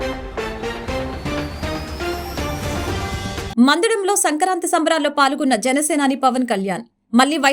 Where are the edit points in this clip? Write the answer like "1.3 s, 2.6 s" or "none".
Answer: 3.5 s